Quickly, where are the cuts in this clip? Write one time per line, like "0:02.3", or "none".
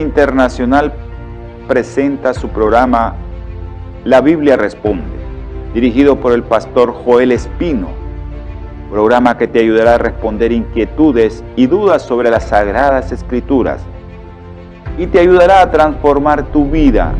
0:01.9